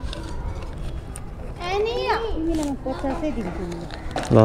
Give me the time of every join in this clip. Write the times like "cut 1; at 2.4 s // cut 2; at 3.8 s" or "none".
none